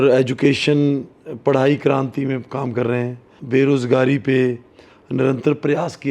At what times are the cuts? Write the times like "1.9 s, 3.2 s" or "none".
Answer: 3.3 s